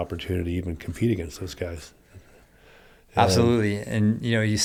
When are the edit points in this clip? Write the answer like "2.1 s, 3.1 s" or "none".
none